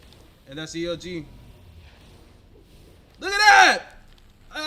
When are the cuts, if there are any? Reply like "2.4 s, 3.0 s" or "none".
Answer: none